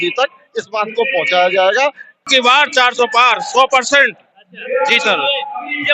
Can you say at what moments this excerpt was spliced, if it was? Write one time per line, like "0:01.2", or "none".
0:02.3